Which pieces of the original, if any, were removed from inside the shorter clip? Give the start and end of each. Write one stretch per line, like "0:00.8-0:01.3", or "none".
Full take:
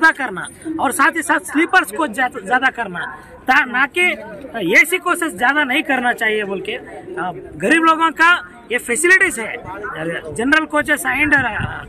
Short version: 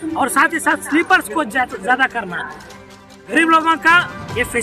0:03.3-0:07.0